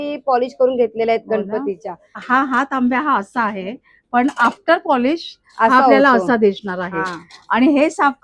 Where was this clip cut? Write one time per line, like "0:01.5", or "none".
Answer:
0:02.1